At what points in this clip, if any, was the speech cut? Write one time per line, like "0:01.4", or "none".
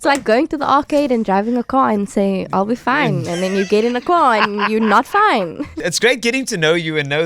none

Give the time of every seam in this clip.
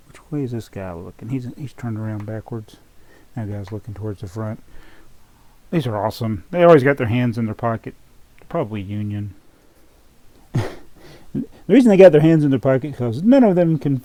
none

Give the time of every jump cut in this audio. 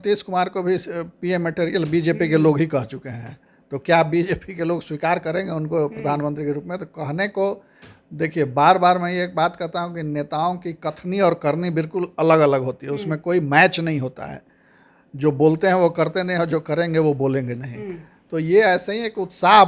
none

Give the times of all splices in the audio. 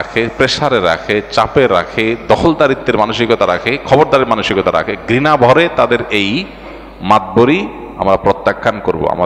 none

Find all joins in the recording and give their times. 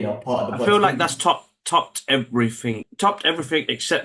0:02.9

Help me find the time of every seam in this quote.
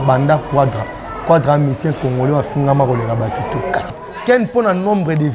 0:03.9

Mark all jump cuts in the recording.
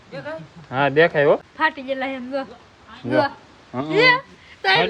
0:01.4

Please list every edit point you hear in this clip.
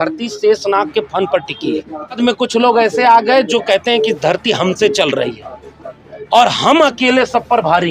0:02.2

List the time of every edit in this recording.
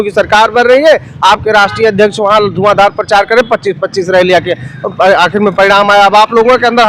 none

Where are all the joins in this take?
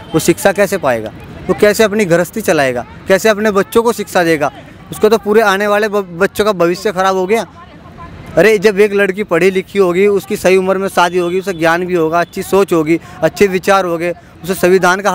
none

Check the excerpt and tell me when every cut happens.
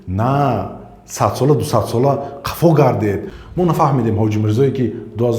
0:03.3

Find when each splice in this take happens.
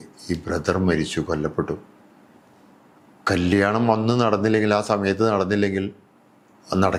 none

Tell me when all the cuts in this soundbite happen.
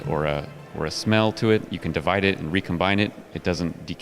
0:01.7

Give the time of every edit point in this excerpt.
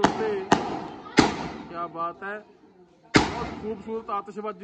none

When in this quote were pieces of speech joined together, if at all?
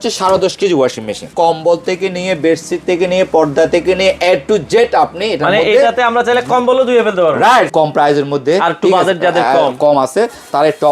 0:01.2
0:07.7

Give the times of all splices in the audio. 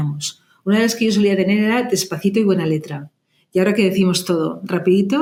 none

